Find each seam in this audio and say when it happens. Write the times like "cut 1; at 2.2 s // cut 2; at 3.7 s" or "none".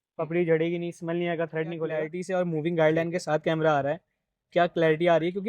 cut 1; at 2.2 s